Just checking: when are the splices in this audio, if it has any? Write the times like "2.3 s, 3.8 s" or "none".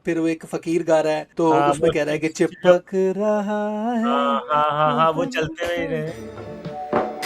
1.3 s